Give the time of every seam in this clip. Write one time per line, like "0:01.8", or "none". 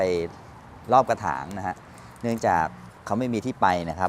0:02.9